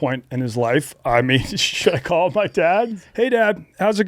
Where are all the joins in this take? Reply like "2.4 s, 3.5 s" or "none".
2.9 s